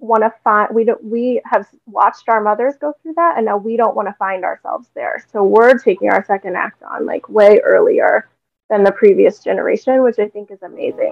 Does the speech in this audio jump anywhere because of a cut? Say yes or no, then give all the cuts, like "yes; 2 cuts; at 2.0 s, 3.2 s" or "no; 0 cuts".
no; 0 cuts